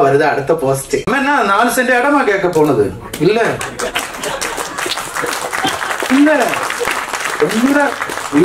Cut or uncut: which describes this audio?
cut